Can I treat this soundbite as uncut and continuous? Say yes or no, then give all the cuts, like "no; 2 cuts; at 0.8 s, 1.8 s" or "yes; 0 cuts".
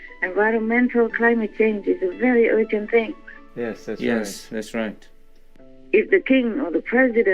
no; 1 cut; at 5.4 s